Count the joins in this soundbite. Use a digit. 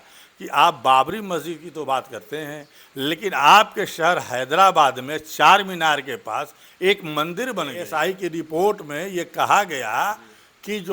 1